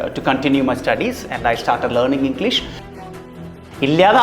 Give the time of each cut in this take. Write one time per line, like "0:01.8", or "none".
0:03.1